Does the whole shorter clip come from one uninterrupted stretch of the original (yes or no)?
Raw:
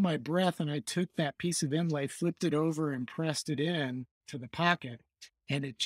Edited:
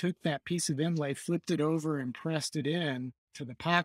yes